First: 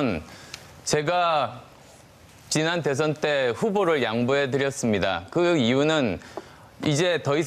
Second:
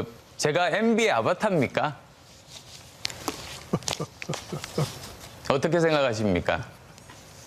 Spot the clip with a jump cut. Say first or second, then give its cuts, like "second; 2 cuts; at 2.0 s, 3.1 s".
first; 1 cut; at 5.5 s